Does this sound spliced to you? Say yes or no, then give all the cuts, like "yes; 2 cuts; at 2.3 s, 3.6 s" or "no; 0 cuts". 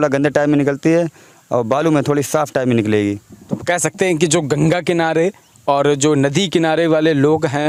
no; 0 cuts